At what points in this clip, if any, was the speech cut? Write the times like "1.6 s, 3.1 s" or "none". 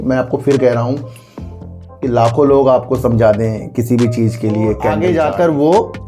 5.0 s